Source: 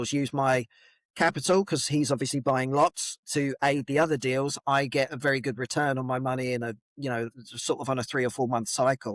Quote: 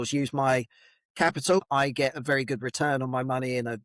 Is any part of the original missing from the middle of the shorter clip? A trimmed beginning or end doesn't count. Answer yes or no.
yes